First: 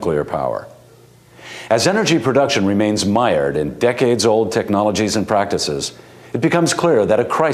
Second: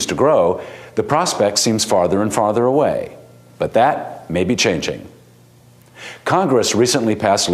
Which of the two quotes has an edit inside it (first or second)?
second